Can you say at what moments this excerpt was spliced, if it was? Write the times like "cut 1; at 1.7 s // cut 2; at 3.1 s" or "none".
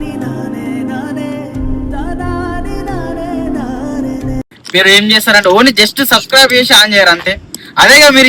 cut 1; at 4.4 s